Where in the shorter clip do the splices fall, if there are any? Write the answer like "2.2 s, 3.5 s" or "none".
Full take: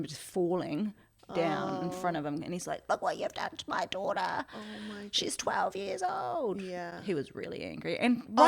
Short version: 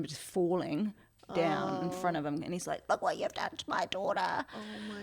none